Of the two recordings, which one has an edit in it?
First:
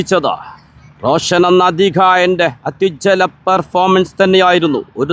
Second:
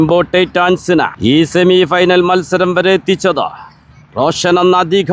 second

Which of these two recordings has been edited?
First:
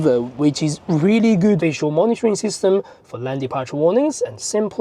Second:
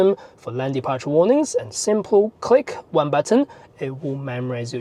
first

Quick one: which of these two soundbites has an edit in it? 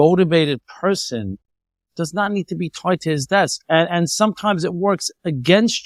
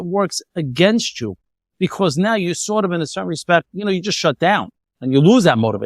second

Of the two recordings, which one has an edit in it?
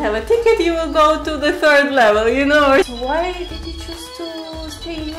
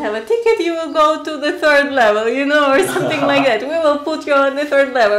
first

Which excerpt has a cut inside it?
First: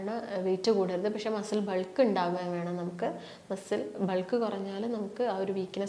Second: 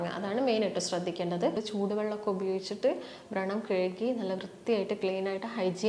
second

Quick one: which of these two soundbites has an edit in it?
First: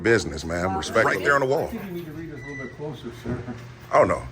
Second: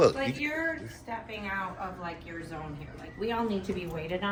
first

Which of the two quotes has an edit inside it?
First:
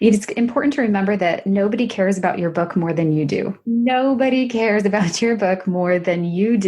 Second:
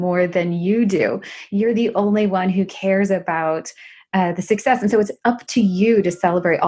first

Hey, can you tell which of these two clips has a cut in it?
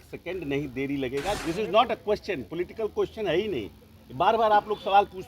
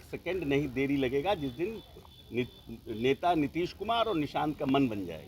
first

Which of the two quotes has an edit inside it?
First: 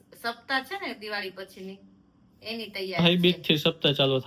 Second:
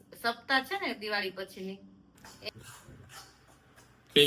second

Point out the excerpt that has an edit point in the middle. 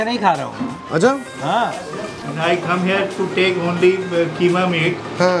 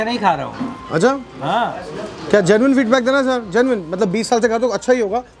first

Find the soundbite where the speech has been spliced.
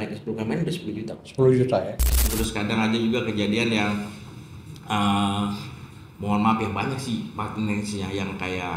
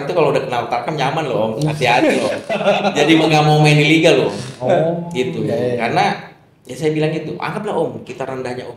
first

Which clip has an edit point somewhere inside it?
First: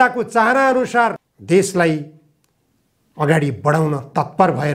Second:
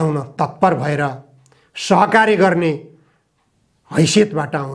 first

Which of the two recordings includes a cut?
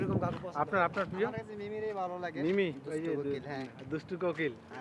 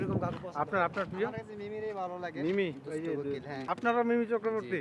second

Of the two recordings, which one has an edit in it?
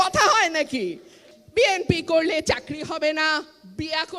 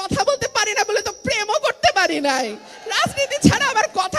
first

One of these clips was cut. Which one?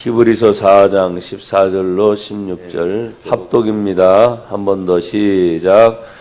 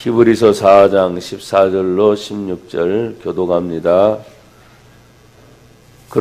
first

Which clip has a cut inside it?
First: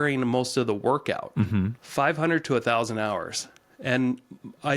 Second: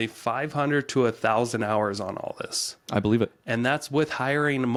first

